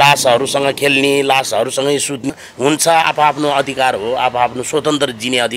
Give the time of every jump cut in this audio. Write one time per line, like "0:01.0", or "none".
0:02.2